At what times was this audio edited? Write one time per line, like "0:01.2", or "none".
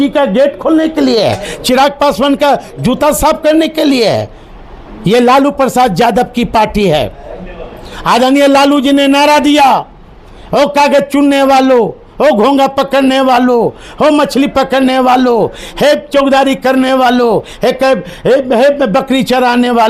none